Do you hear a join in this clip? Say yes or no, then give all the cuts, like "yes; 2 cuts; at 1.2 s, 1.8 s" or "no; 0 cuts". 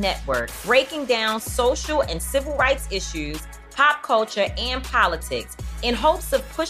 no; 0 cuts